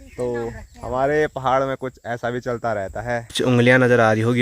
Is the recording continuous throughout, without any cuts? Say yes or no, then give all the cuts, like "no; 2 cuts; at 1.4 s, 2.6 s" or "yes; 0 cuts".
no; 1 cut; at 3.3 s